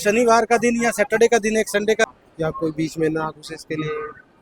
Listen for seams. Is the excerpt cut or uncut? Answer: cut